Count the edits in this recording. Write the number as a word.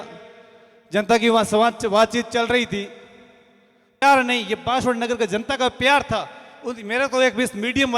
one